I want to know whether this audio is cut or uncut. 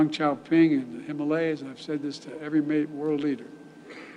cut